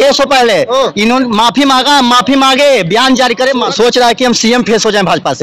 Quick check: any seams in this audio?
yes; 1 cut; at 3.7 s

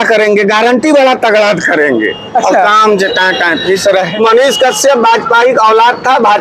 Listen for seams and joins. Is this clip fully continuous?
no; 1 cut; at 4.1 s

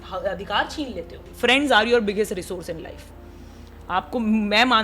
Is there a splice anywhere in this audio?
yes; 1 cut; at 1.3 s

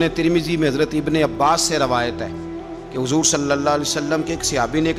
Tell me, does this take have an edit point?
no; 0 cuts

